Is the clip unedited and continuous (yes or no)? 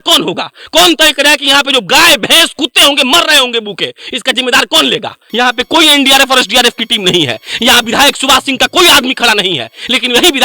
no